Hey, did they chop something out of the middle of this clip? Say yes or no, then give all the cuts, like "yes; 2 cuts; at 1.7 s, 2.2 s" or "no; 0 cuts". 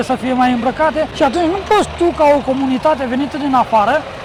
no; 0 cuts